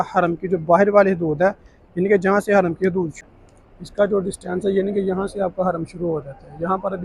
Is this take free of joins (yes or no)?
no